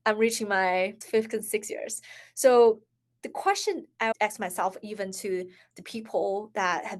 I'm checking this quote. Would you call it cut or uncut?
cut